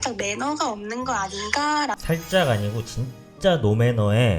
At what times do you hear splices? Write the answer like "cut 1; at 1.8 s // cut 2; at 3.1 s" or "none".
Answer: cut 1; at 2.0 s